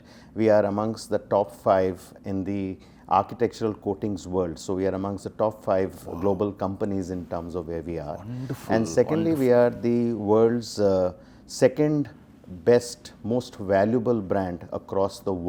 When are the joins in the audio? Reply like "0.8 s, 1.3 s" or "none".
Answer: none